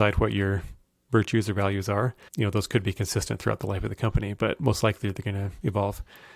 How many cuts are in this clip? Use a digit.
1